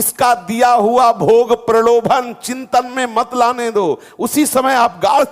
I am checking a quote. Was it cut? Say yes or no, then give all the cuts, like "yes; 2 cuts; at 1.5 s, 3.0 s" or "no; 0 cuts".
no; 0 cuts